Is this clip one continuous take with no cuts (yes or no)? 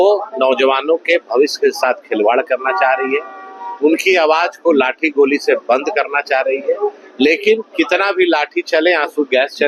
yes